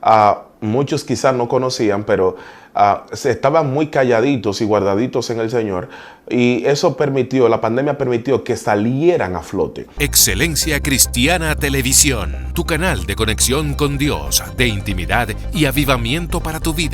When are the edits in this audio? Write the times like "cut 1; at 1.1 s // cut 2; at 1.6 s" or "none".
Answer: cut 1; at 9.9 s